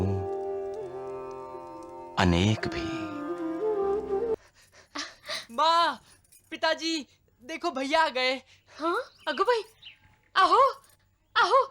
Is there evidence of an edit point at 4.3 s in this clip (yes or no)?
yes